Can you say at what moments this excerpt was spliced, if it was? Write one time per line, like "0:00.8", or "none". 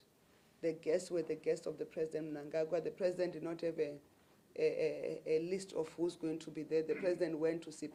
none